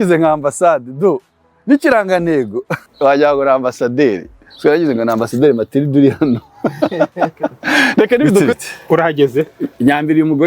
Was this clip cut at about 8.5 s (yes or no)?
yes